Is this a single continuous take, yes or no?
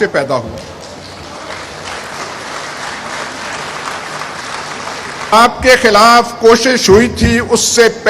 no